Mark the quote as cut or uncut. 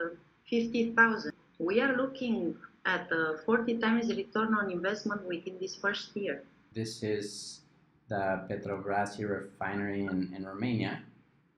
cut